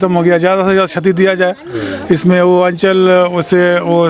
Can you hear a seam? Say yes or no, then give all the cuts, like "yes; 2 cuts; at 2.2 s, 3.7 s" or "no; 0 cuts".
no; 0 cuts